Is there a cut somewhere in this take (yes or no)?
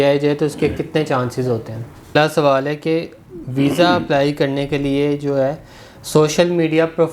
yes